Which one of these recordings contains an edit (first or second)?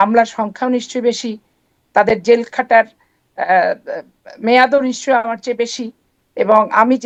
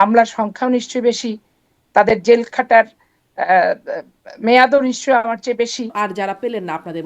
second